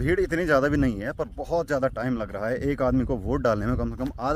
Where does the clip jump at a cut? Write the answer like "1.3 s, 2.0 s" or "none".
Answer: none